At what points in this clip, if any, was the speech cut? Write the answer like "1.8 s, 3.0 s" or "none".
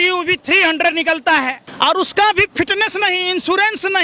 1.6 s